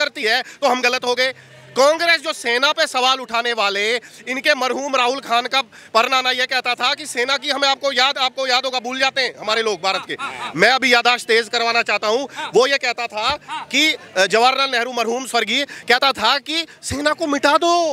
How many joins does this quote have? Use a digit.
0